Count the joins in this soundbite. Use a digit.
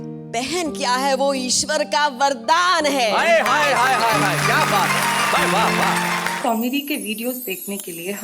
1